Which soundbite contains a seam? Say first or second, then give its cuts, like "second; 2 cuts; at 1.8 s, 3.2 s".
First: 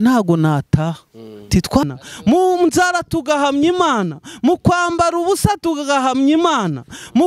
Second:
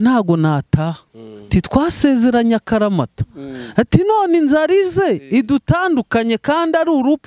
first; 1 cut; at 1.8 s